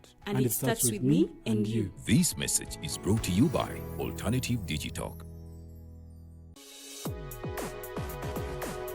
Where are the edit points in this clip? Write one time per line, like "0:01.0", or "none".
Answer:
0:06.4